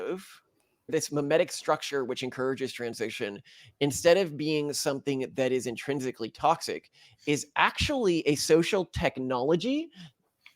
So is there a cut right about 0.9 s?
yes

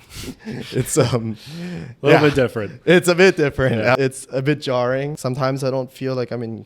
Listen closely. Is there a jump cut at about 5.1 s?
yes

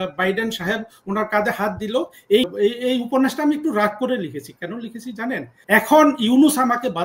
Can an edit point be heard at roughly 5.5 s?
yes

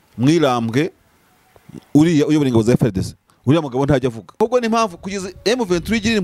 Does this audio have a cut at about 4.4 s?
yes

